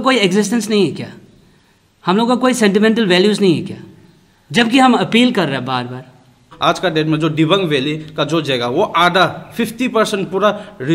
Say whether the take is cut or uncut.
cut